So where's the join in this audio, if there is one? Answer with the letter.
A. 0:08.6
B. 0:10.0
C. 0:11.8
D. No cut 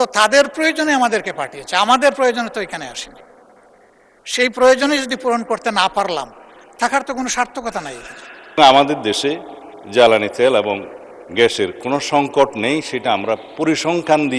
A